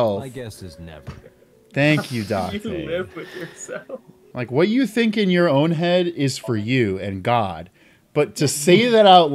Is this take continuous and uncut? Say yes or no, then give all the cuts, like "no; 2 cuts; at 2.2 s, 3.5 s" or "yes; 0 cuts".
no; 1 cut; at 4.2 s